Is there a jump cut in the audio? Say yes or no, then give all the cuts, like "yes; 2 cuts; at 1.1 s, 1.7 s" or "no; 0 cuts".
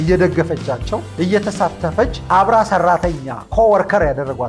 yes; 2 cuts; at 1.1 s, 2.2 s